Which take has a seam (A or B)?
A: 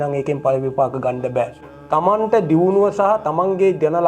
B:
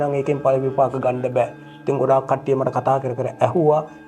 A